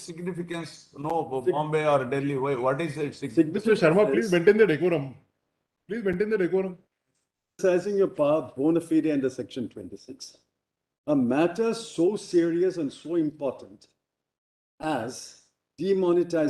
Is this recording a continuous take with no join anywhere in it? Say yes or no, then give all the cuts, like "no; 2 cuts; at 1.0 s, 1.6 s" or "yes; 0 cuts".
no; 1 cut; at 7.6 s